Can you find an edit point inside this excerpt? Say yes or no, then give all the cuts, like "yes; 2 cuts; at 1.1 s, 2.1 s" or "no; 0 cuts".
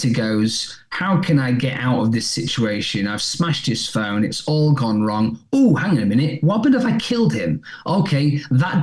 no; 0 cuts